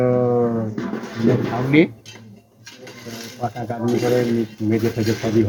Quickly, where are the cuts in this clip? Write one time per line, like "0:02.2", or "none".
none